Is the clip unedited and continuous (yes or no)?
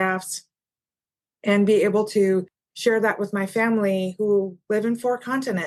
yes